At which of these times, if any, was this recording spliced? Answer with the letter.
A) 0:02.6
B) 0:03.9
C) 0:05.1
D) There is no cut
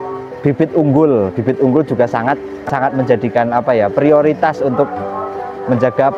A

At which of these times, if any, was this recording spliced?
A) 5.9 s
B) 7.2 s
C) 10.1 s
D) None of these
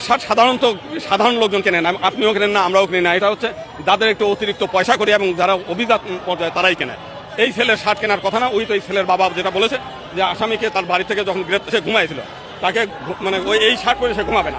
D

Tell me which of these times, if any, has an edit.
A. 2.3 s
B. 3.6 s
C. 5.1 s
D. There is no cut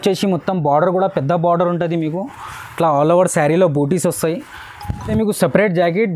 D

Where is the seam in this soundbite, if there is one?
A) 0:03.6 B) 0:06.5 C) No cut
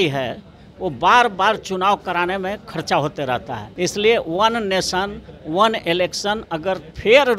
A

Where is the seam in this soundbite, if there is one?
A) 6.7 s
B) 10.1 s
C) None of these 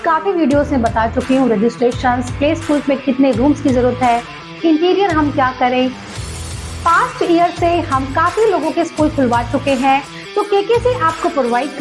B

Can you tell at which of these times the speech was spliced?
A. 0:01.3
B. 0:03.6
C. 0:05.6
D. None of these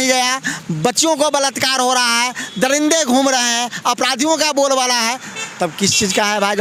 D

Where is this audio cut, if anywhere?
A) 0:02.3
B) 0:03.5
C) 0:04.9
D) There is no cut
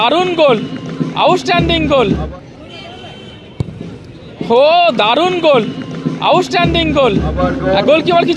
A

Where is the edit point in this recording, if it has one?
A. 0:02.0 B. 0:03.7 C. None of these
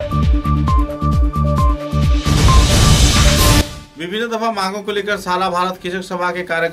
B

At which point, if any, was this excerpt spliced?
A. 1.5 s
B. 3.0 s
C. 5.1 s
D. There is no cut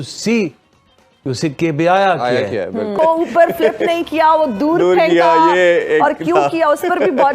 B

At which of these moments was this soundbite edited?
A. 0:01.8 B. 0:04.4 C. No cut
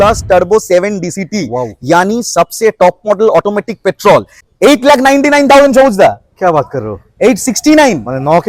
B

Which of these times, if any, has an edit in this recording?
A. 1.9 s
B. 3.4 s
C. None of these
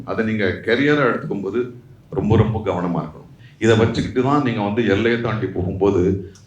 B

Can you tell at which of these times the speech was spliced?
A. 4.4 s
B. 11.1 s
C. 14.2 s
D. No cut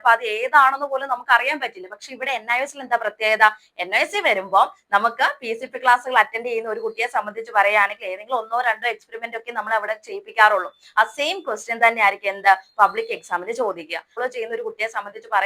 C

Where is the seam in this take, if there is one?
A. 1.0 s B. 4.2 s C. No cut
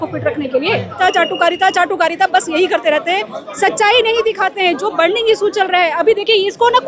A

